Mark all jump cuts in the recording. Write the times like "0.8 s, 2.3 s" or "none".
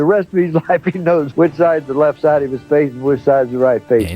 1.3 s